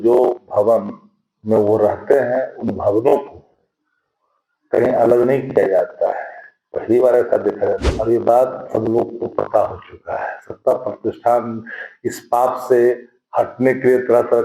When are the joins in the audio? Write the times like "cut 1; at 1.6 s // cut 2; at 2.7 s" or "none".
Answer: cut 1; at 7.8 s